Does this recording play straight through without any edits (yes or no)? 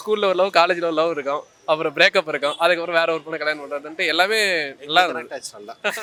yes